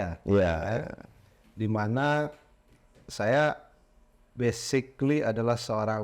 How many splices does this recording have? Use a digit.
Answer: 0